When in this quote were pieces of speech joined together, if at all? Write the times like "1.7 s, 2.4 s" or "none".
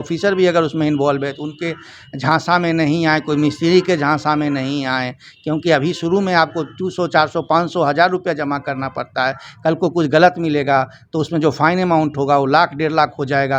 none